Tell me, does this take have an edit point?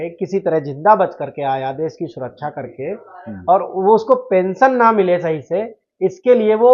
no; 0 cuts

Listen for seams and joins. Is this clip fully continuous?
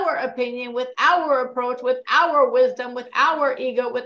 yes; 0 cuts

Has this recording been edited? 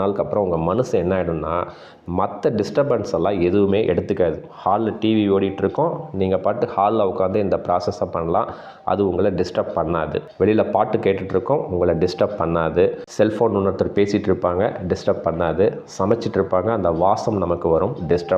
no; 0 cuts

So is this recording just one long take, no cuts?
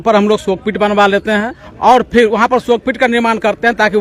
no; 1 cut; at 1.6 s

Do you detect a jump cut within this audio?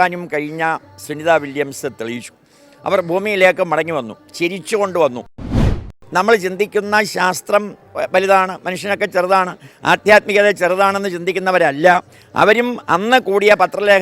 yes; 1 cut; at 5.7 s

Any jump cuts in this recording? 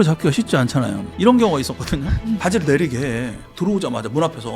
yes; 1 cut; at 1.1 s

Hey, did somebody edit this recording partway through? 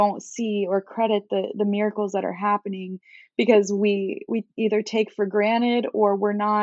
no; 0 cuts

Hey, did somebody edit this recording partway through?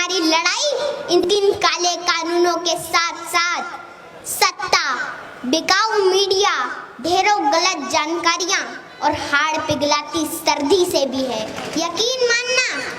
yes; 2 cuts; at 1.3 s, 11.6 s

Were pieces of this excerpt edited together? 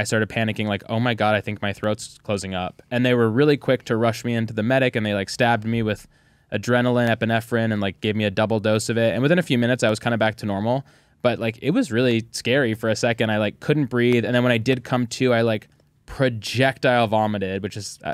no; 0 cuts

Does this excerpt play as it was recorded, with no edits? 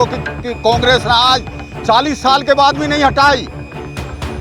yes; 0 cuts

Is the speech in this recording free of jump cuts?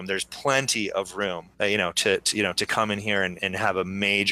no; 2 cuts; at 1.4 s, 3.3 s

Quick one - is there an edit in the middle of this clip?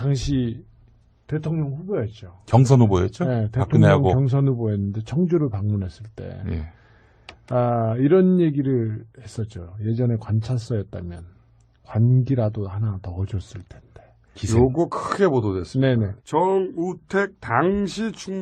no; 0 cuts

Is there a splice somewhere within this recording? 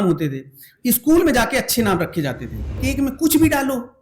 yes; 1 cut; at 2.8 s

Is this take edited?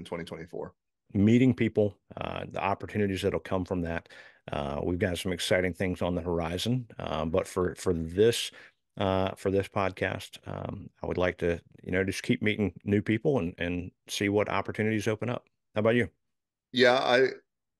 yes; 1 cut; at 1.0 s

